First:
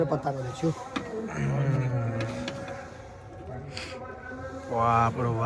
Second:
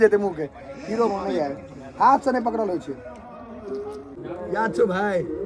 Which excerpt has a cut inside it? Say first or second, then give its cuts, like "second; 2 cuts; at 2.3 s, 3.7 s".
second; 1 cut; at 4.2 s